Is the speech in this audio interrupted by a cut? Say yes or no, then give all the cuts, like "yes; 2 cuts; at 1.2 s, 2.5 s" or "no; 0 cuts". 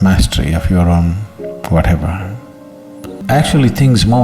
yes; 1 cut; at 3.2 s